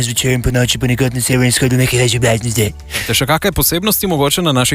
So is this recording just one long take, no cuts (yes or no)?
no